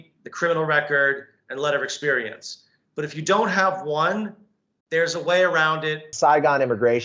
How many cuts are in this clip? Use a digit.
1